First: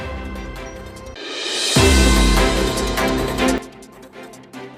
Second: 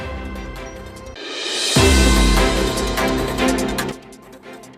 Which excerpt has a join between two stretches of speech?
first; 1 cut; at 3.6 s

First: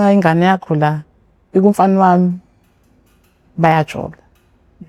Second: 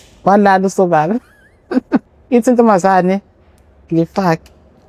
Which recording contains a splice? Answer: second; 1 cut; at 2.1 s

